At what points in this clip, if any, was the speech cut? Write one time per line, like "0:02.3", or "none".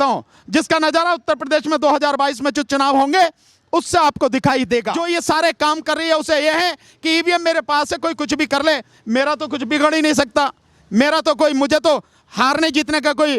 0:05.0